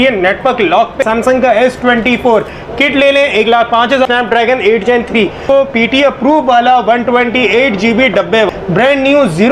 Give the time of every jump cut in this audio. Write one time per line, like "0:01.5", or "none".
0:01.0
0:04.0
0:05.4
0:08.5

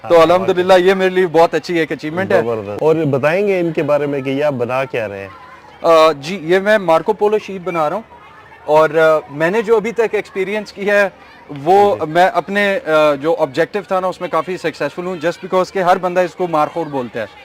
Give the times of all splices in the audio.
none

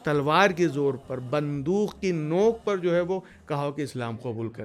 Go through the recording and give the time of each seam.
none

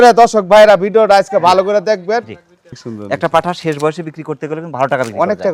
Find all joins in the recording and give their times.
0:02.7

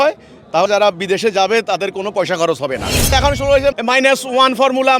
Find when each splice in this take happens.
0:03.0

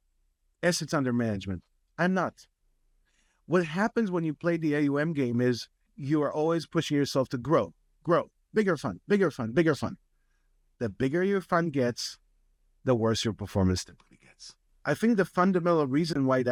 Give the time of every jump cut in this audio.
none

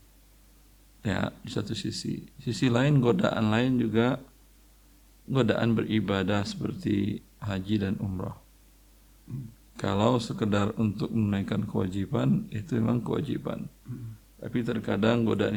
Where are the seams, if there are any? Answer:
none

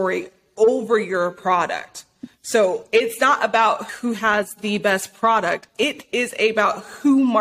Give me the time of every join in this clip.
0:03.9
0:05.8

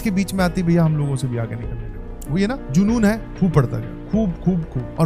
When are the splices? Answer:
none

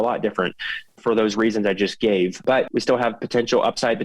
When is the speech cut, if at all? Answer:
0:01.0
0:02.4

